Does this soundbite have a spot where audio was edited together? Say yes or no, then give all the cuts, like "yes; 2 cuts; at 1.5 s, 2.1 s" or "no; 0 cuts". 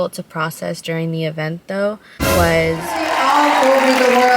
yes; 1 cut; at 3.0 s